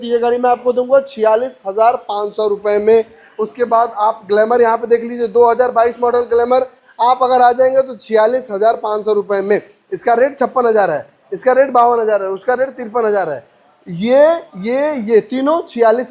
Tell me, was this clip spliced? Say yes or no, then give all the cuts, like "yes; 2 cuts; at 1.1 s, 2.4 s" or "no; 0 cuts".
no; 0 cuts